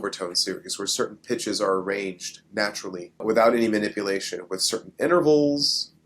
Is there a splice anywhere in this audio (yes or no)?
yes